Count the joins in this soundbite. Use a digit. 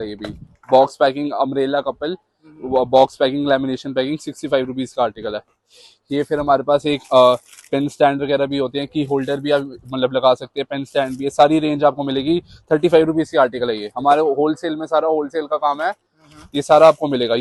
0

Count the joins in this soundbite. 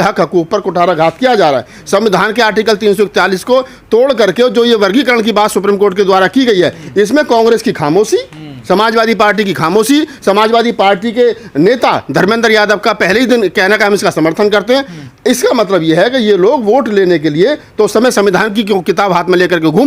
0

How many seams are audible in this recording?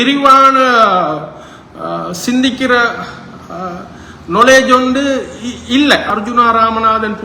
1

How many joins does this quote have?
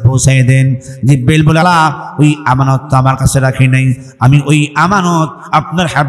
1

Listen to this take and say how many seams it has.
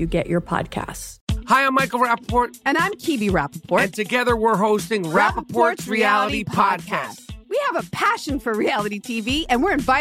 1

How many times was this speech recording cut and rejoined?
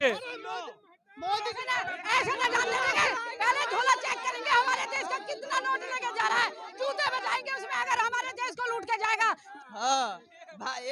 1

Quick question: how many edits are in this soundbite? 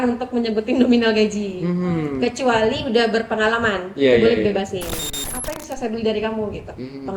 1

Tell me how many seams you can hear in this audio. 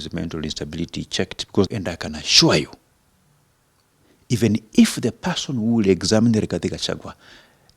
1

